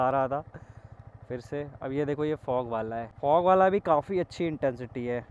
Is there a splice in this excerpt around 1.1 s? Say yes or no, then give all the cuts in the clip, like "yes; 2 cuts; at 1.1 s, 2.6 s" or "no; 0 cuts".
no; 1 cut; at 3.1 s